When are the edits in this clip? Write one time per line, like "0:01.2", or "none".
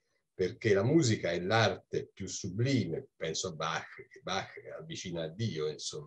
0:03.1